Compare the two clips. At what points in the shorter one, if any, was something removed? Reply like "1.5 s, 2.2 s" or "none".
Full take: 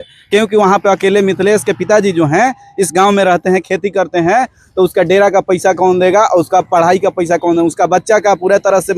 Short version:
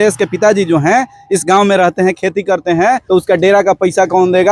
3.0 s